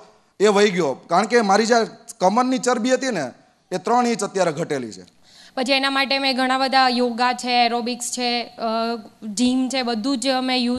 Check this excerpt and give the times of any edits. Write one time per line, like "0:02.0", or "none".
0:05.4